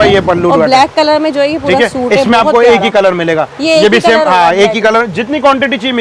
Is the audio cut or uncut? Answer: uncut